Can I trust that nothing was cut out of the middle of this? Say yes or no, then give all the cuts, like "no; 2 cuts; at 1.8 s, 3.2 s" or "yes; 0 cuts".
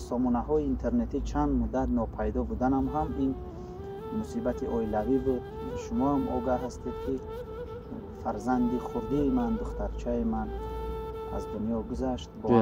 yes; 0 cuts